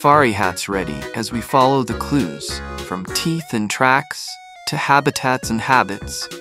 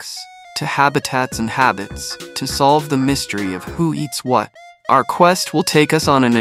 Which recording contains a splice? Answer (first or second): second